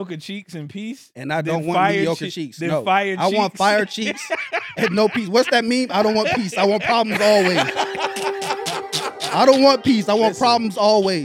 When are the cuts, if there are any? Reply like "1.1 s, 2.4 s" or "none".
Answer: none